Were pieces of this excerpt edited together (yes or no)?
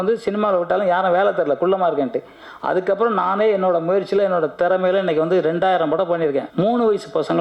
yes